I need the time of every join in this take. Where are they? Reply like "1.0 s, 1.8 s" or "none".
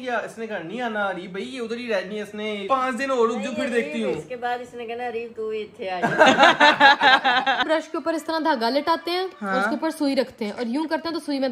2.6 s, 7.6 s